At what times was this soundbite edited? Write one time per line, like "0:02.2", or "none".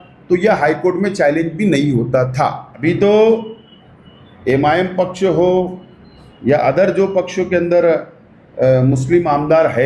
0:02.8

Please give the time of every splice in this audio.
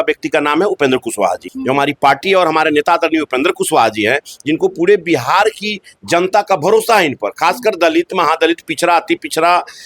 0:01.5

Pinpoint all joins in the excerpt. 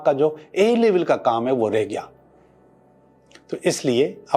none

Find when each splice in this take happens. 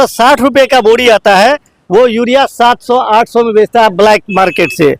none

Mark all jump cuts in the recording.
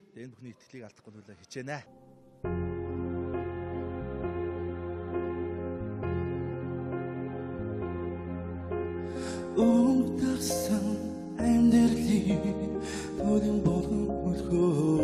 none

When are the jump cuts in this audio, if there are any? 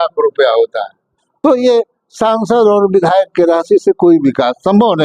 0:01.2

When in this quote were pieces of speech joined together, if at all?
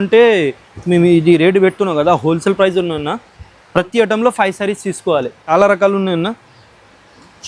0:05.5

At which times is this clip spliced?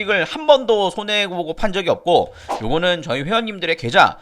0:02.4

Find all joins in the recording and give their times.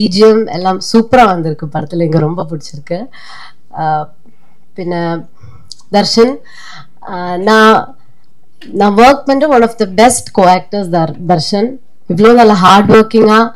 none

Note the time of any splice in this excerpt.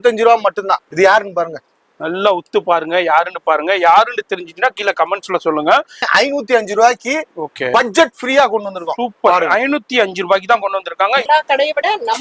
0:00.9
0:06.0
0:11.2

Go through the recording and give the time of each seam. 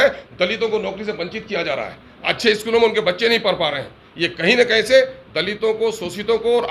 none

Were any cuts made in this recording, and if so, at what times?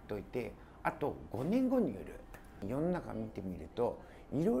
0:02.7

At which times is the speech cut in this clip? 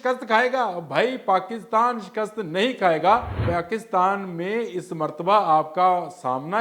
0:03.3

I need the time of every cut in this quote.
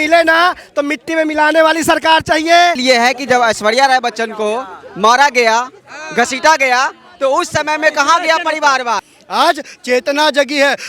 0:02.8
0:09.1

